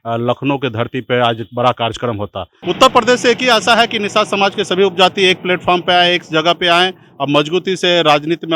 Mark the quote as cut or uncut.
cut